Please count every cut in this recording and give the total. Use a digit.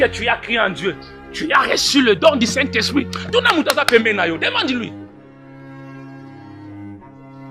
0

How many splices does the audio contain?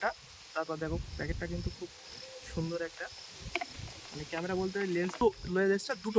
1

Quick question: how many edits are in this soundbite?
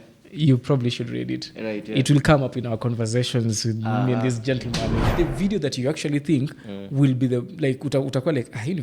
1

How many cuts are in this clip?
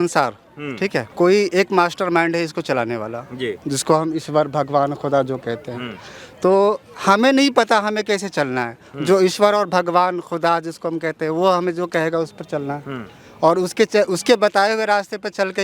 1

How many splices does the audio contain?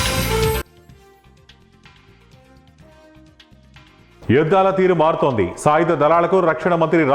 1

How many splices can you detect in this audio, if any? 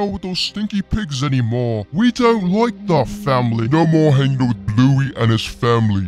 1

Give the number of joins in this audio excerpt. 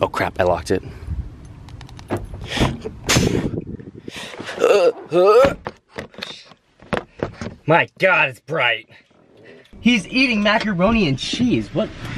2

